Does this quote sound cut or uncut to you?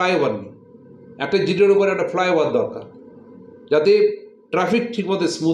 uncut